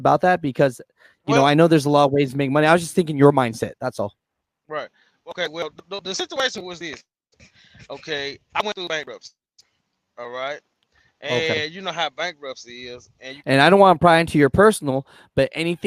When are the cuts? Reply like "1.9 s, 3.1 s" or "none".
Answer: 13.3 s